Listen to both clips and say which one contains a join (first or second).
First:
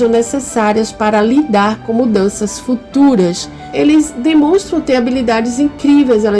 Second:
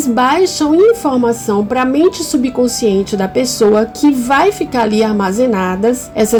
first